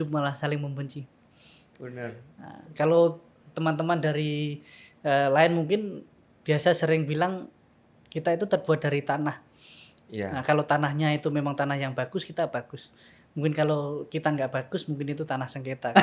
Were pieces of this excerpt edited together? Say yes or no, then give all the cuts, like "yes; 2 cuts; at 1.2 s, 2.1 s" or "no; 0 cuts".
yes; 1 cut; at 1.7 s